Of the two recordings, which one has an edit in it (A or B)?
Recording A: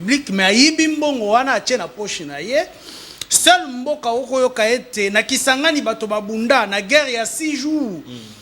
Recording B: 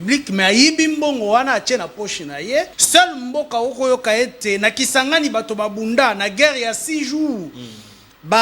B